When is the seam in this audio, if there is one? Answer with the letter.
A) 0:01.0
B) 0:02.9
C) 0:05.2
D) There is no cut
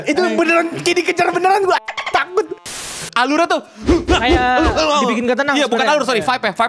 B